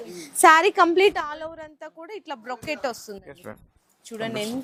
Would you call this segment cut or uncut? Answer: uncut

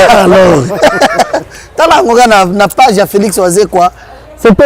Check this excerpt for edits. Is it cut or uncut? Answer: uncut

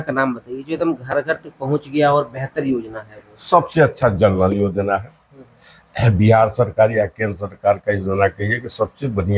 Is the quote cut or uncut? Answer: uncut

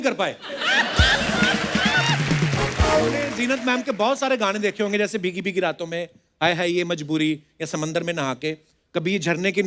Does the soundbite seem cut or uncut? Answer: cut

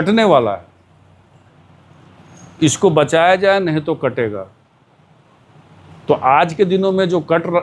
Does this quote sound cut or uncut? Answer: uncut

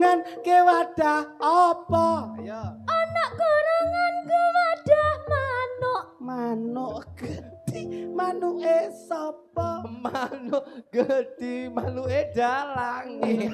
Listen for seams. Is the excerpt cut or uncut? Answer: uncut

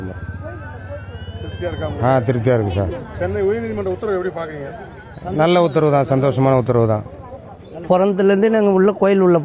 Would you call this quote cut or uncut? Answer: uncut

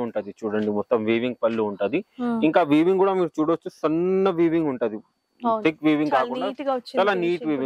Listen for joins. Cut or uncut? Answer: uncut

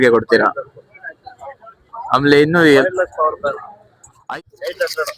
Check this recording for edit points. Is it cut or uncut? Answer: cut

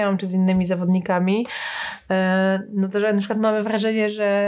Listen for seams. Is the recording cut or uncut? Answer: uncut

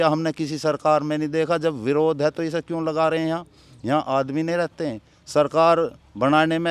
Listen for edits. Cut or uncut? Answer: uncut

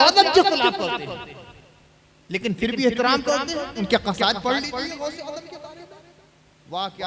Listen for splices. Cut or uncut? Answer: uncut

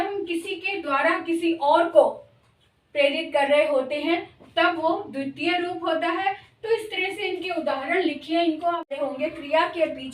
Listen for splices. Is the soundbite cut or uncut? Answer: cut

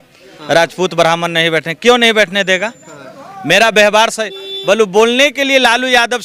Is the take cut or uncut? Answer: uncut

